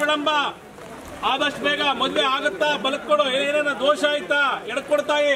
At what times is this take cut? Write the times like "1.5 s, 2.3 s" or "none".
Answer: none